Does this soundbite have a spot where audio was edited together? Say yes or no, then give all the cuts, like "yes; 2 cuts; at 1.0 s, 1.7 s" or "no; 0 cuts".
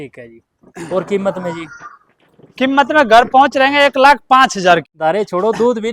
yes; 1 cut; at 4.9 s